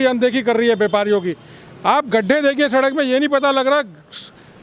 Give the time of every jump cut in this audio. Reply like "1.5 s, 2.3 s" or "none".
none